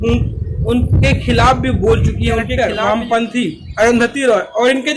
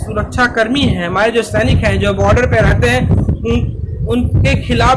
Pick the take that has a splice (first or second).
first